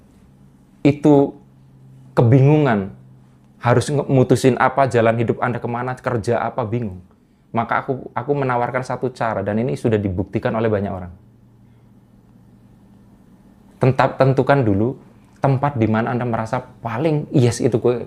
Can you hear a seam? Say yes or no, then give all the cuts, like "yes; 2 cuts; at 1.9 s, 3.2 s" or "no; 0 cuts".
no; 0 cuts